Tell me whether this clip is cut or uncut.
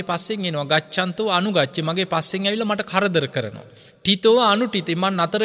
uncut